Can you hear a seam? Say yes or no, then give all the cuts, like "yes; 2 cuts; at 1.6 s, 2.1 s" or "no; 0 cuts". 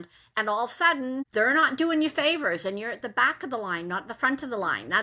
yes; 1 cut; at 1.3 s